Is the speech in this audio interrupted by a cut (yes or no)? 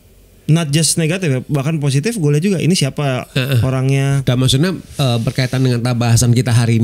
yes